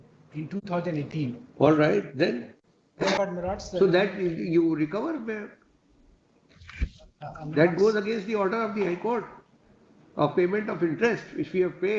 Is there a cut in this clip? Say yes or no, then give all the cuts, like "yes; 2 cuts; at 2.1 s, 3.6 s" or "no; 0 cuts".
yes; 1 cut; at 3.2 s